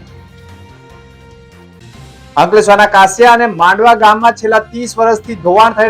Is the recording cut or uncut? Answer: cut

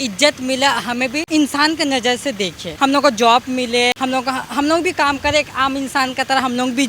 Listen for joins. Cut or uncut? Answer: cut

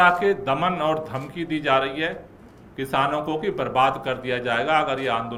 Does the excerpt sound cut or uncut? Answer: uncut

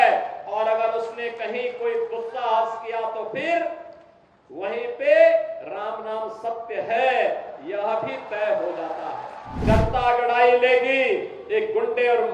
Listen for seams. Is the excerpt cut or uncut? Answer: cut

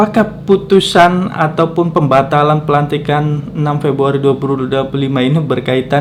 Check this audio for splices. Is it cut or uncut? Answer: uncut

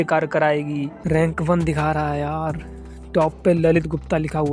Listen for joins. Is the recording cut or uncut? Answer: cut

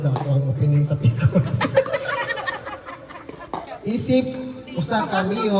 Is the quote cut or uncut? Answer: cut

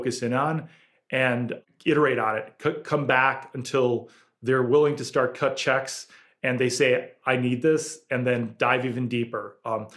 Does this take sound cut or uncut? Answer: cut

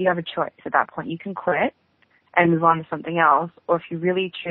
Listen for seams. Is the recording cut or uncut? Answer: uncut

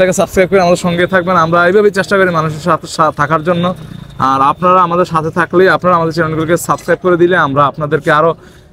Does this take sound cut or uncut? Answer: uncut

